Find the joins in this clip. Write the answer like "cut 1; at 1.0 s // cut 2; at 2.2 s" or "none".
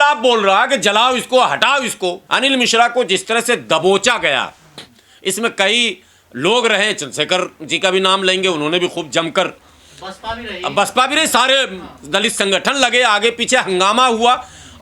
cut 1; at 2.2 s